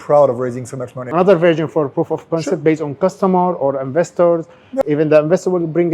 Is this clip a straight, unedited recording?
no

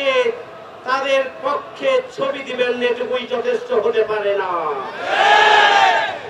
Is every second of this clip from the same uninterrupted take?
yes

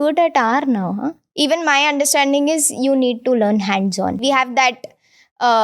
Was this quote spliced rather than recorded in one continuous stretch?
yes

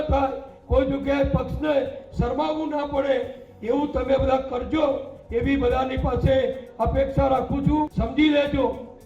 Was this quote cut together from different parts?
yes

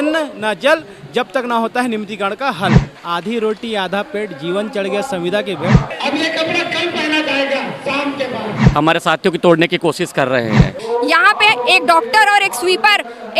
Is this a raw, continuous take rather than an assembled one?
no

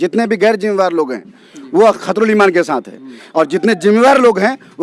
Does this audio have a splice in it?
no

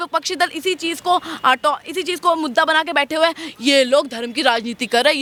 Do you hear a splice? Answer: no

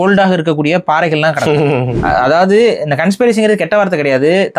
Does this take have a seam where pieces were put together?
yes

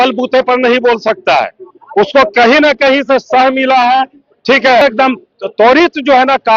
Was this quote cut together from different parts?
yes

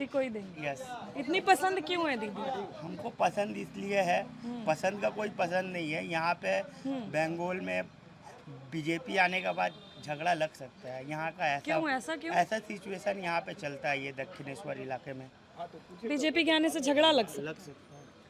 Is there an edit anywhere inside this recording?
no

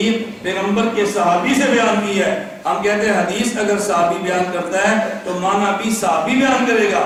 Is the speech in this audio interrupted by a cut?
no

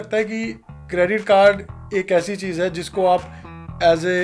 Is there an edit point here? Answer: no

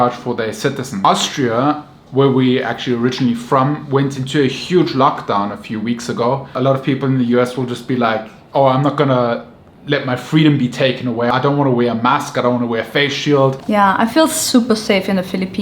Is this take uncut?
no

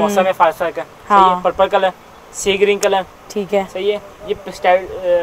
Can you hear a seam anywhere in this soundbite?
no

